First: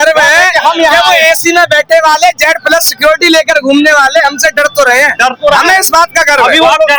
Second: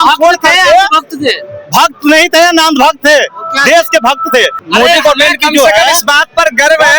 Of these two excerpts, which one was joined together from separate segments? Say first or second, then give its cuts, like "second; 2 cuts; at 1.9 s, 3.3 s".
second; 1 cut; at 4.6 s